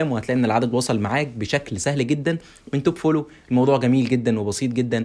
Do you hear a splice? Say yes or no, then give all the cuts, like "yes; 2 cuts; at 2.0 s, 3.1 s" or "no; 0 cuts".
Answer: no; 0 cuts